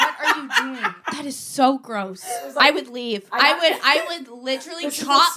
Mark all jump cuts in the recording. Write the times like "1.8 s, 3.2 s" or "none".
1.0 s, 2.5 s